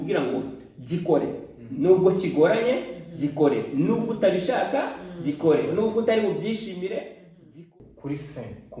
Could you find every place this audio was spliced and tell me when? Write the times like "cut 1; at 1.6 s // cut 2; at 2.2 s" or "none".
cut 1; at 7.5 s